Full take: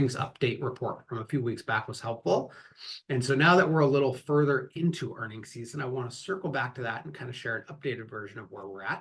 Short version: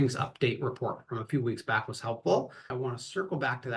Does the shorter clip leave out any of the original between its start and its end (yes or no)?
yes